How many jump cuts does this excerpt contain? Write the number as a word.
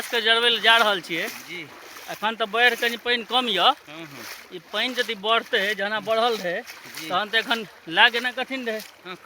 zero